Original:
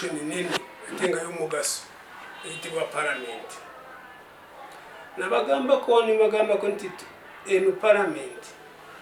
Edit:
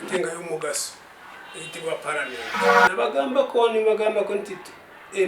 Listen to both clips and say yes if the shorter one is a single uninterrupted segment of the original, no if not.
no